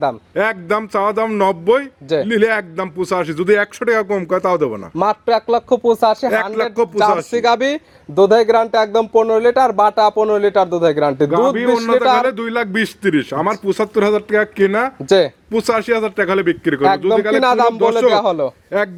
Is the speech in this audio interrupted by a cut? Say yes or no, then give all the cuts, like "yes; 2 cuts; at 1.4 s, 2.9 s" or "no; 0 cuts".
no; 0 cuts